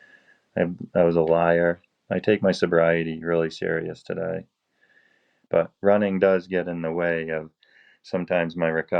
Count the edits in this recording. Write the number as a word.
one